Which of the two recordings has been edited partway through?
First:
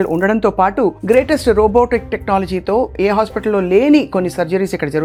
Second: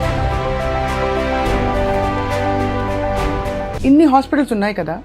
second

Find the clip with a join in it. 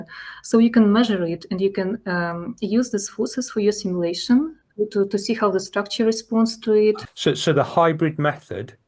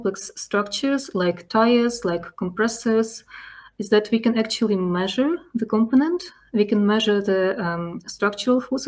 first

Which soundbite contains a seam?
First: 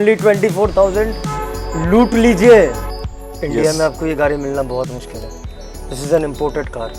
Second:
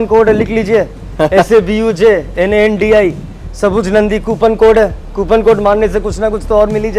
first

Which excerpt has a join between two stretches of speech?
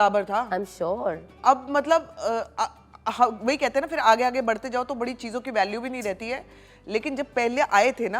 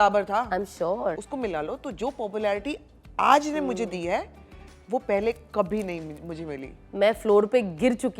second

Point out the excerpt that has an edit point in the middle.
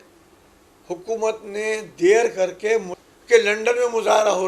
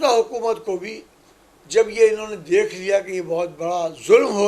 first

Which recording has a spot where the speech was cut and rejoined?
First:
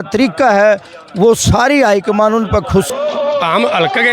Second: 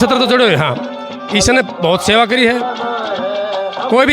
first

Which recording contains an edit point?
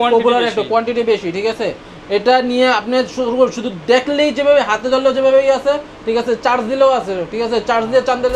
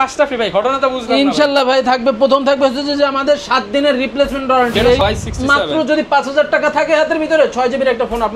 second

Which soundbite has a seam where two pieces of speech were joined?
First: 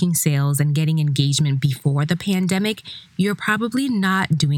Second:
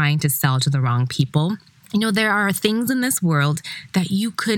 second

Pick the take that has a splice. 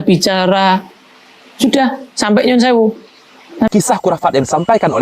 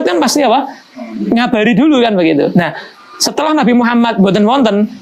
first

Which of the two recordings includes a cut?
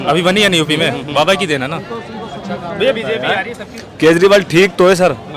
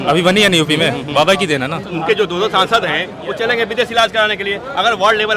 second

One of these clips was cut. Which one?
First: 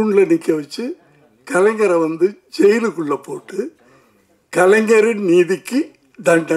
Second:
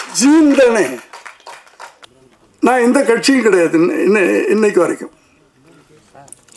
second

